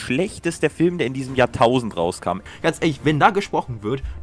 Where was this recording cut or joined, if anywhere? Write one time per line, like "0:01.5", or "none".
0:02.4

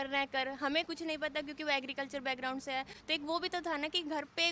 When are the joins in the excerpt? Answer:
none

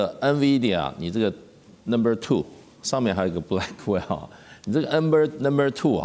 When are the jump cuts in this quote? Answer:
none

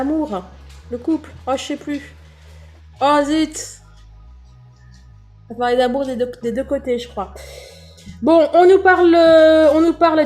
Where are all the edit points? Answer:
0:03.7
0:05.5

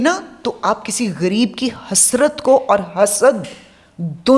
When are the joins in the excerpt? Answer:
none

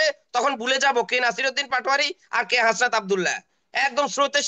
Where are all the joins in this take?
none

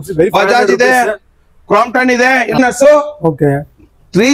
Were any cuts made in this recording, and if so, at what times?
0:02.6

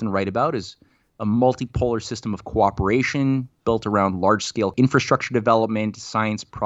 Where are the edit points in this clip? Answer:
0:04.7

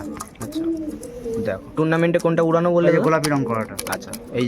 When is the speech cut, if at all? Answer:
0:01.7

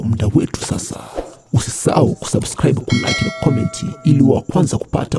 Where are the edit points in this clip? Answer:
none

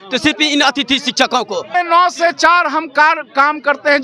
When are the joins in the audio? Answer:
0:01.7

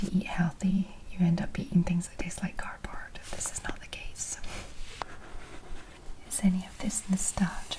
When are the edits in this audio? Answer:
0:05.1

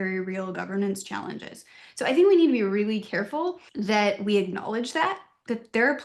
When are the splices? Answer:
0:03.7

